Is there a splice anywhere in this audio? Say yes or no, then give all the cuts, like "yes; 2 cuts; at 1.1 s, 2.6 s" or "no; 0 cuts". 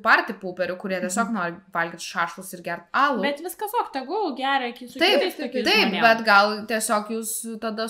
no; 0 cuts